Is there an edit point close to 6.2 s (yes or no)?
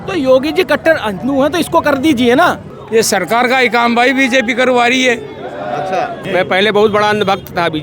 yes